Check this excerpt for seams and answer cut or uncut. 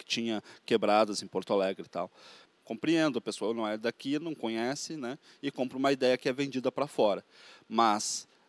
cut